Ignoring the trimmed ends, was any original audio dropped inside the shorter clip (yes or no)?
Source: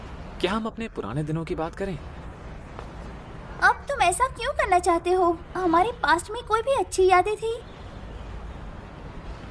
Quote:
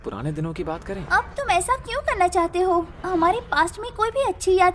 yes